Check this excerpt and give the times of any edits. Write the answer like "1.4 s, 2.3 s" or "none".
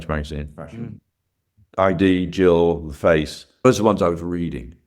1.8 s